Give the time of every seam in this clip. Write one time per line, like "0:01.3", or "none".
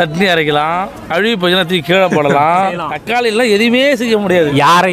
0:01.0
0:03.0

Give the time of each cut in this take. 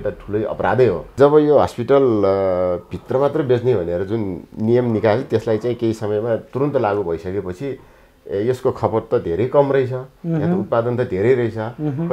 0:01.2

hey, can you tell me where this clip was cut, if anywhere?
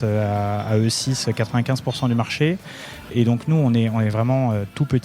0:03.1

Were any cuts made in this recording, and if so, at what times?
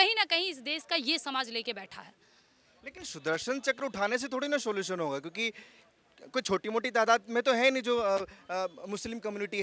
none

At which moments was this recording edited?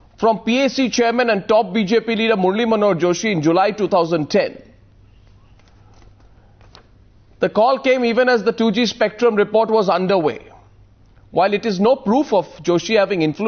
0:04.2

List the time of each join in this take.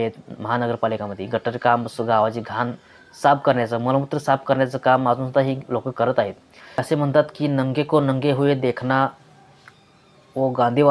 0:06.8

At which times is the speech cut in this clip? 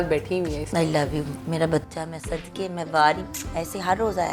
none

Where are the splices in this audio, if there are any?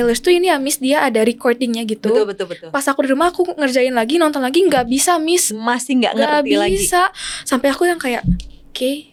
none

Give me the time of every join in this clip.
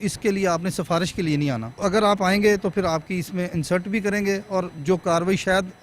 0:01.8
0:04.7

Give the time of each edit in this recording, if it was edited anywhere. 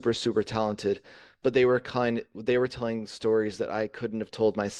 none

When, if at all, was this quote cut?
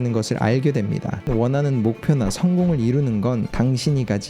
0:01.3

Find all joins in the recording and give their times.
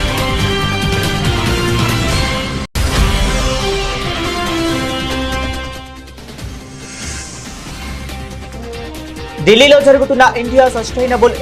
none

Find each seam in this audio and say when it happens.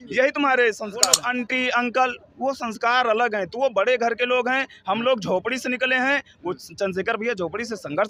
0:01.1

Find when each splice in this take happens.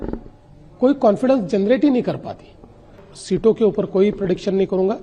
0:03.0

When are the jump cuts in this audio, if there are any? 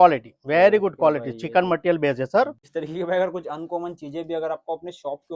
0:02.6

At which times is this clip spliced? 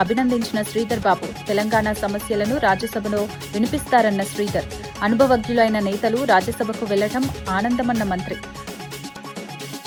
none

